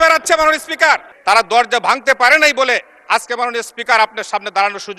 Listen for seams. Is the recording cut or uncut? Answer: cut